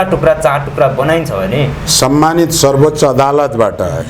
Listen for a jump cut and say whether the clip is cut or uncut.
cut